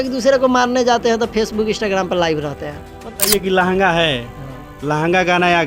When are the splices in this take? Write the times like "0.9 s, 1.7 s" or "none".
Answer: 3.1 s